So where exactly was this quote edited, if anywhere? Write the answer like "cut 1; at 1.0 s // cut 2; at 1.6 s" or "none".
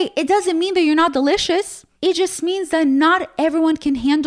cut 1; at 1.8 s